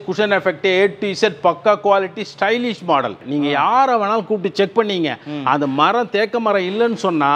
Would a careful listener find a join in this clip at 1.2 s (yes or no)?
no